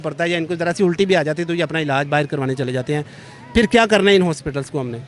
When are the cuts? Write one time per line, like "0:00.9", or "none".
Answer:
none